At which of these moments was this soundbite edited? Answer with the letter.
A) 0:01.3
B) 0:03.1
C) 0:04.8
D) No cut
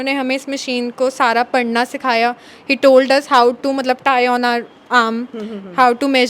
D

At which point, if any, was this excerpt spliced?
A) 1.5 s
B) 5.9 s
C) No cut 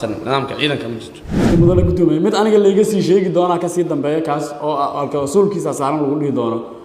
A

